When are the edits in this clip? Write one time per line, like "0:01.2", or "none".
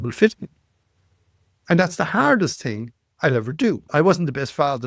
0:03.9